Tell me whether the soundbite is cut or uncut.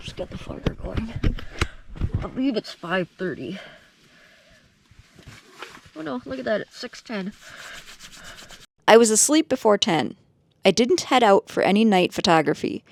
uncut